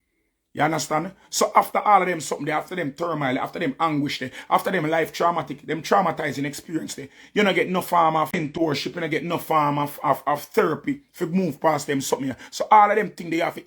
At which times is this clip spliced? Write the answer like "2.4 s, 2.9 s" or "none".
8.3 s